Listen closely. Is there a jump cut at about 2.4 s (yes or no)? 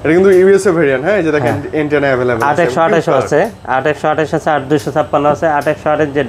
no